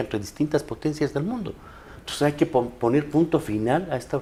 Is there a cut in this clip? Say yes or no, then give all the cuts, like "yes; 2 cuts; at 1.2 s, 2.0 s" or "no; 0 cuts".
no; 0 cuts